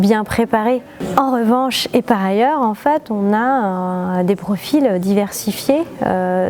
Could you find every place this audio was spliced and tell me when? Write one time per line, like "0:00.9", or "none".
0:01.1